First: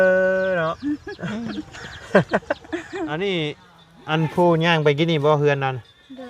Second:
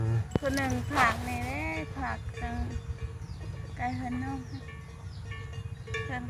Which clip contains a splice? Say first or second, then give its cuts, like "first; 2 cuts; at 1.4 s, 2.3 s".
first; 1 cut; at 3.1 s